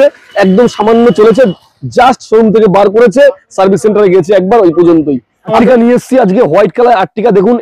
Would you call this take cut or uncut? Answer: cut